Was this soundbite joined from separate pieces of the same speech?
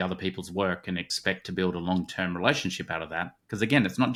no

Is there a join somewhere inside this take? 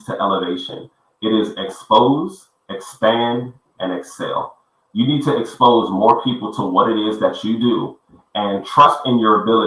no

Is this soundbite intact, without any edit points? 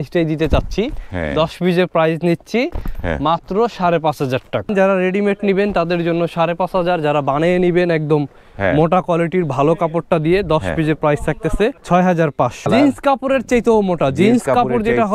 no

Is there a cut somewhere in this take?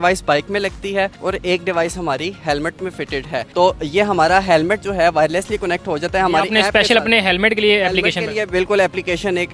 no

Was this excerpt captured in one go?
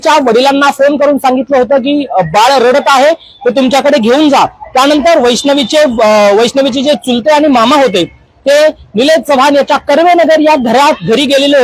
yes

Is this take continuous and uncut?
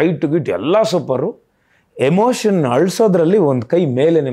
yes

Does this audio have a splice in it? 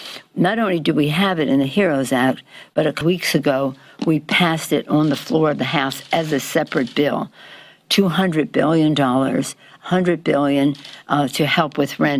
yes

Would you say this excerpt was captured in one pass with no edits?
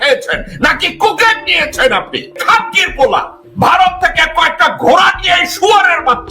no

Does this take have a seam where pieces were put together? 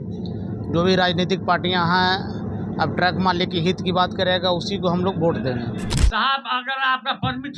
yes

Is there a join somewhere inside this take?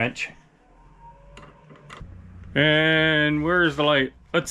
yes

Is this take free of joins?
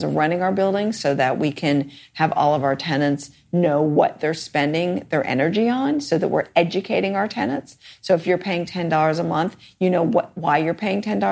yes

